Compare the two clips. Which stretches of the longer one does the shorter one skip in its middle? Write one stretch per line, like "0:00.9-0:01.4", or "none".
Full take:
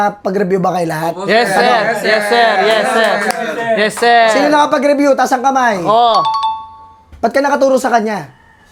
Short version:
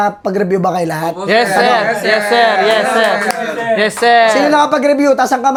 none